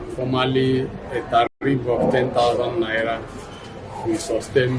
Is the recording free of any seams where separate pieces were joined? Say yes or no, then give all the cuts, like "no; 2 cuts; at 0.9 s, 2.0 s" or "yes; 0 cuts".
no; 1 cut; at 1.6 s